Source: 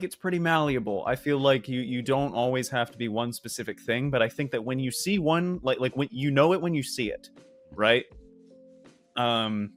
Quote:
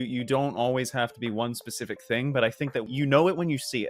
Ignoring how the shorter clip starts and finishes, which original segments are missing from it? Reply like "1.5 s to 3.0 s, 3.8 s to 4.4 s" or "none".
4.7 s to 6.1 s